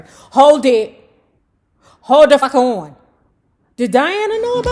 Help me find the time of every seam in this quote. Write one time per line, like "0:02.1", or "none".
0:02.4